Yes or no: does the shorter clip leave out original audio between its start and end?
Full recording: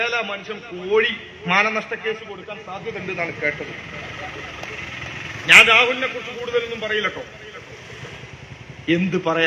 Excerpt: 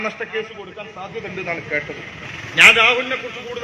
yes